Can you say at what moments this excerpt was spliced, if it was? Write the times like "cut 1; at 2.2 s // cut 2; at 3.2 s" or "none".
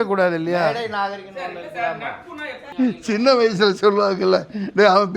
cut 1; at 2.6 s